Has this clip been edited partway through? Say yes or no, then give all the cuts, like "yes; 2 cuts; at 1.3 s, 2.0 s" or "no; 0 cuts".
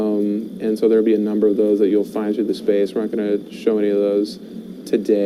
no; 0 cuts